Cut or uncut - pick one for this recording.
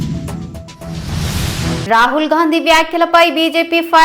cut